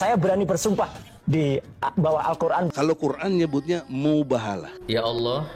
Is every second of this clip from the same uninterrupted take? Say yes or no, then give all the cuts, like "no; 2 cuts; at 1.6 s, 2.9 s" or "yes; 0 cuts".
no; 1 cut; at 2.7 s